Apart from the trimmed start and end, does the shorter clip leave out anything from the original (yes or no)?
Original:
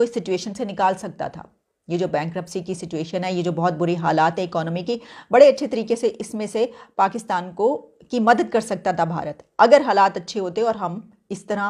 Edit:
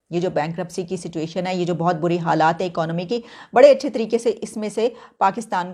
no